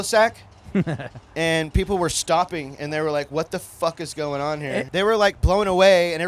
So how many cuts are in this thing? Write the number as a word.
one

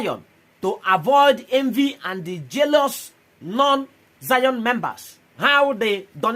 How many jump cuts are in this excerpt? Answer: one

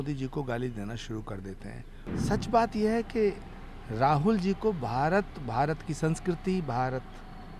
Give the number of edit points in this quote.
one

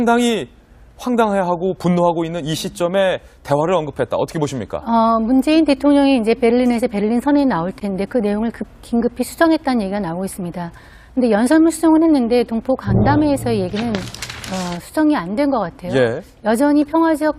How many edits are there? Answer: zero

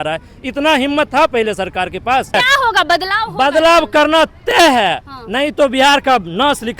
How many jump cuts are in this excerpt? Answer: one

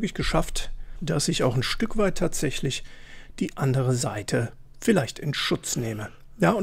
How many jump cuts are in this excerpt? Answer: one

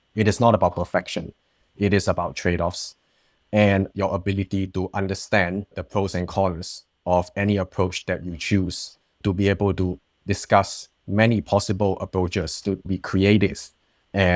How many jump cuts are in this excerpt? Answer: two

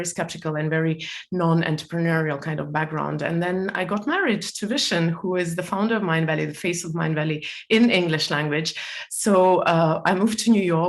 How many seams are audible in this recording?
zero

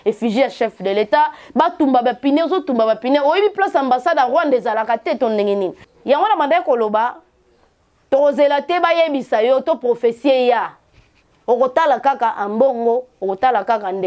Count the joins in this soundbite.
one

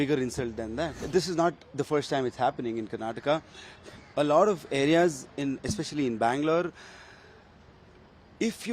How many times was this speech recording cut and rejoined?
one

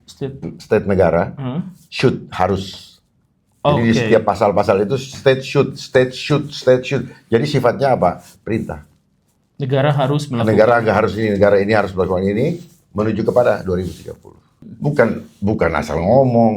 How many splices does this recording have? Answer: one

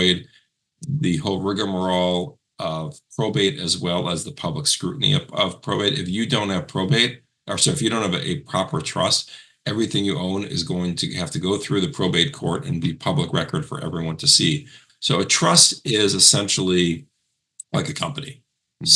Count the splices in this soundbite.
one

